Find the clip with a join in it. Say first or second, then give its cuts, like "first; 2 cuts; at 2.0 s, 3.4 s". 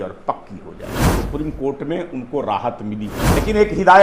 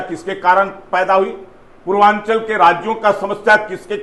first; 2 cuts; at 1.0 s, 3.2 s